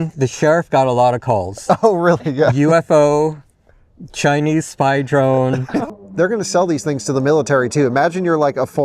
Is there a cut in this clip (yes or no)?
yes